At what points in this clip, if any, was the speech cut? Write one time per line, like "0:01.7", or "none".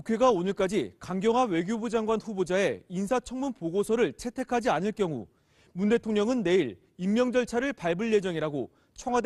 none